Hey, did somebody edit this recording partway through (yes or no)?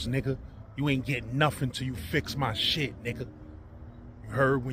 no